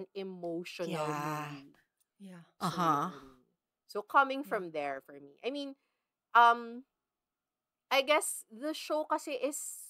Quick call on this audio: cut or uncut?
uncut